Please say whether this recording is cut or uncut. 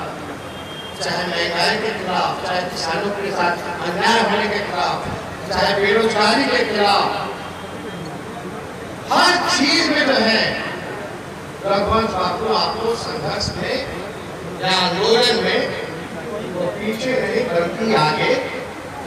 uncut